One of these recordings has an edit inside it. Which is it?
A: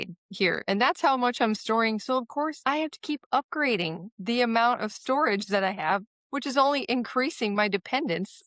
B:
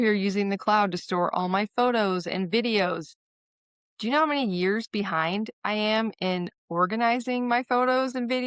A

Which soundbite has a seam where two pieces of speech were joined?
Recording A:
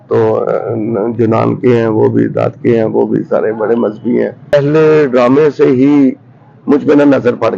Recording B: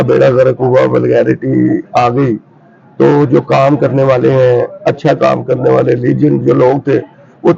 A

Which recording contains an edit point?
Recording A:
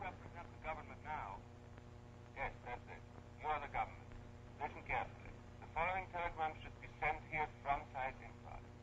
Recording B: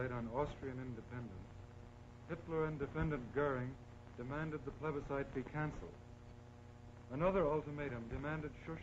A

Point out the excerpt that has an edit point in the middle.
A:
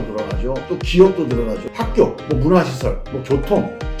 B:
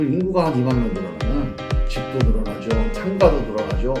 A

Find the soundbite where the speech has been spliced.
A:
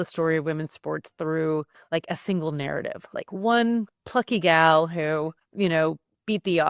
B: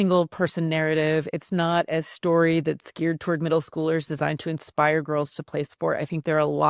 A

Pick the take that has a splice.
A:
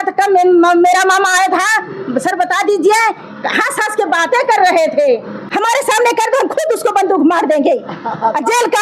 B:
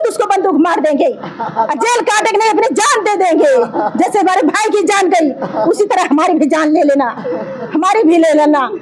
A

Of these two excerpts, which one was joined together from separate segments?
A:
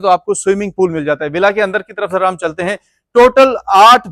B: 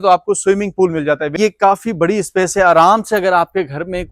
B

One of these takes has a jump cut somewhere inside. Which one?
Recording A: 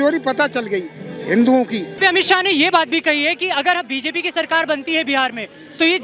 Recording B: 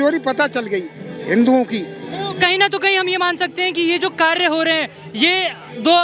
A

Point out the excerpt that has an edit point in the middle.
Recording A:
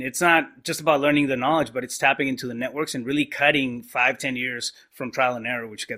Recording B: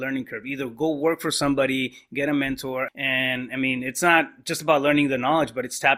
B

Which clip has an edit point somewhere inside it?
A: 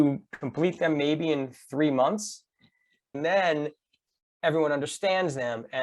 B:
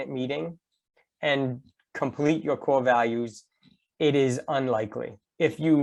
A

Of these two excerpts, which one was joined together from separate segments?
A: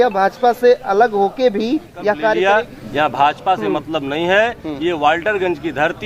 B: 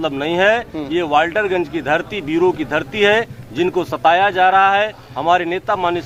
A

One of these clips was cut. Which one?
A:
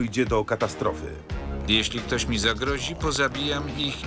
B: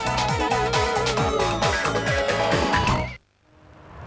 B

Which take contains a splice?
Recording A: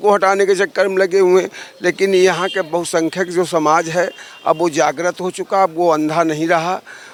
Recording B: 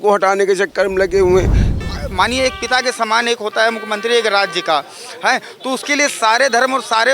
B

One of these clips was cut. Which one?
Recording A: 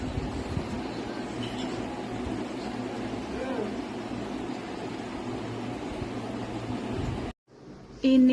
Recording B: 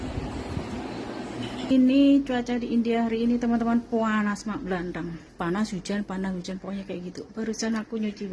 B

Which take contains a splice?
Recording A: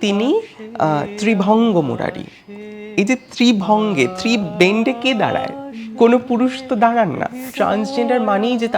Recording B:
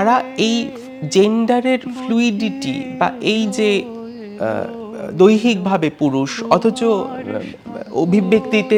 A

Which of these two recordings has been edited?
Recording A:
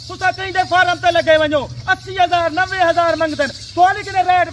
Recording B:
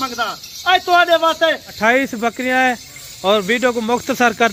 B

